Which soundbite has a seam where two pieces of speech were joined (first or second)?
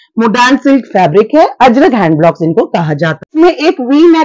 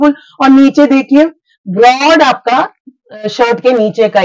first